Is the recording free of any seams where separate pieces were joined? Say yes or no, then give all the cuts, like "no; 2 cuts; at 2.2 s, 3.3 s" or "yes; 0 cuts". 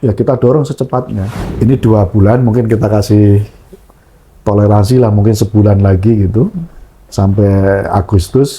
no; 1 cut; at 1.2 s